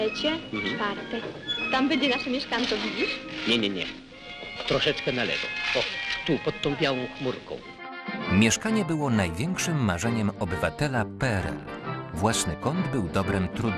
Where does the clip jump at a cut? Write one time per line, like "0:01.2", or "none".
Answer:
none